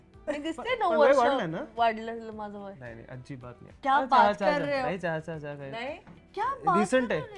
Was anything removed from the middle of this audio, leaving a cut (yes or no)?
yes